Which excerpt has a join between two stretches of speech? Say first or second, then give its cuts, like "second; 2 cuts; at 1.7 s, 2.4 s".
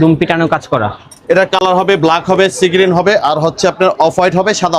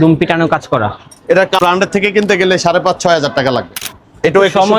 second; 2 cuts; at 1.6 s, 3.8 s